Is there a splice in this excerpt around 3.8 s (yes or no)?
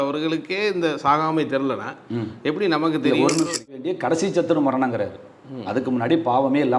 yes